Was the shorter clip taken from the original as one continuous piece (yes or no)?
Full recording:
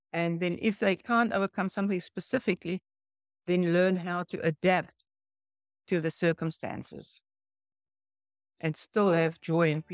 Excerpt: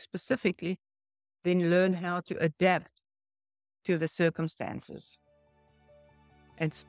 yes